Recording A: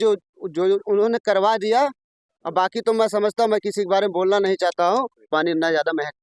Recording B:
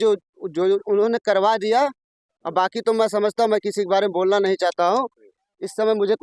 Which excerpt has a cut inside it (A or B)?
A